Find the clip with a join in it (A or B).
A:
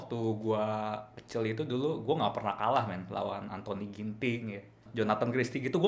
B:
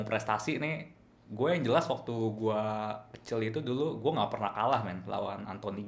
A